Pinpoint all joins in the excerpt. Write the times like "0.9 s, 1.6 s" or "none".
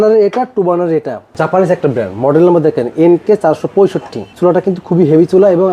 1.3 s, 4.3 s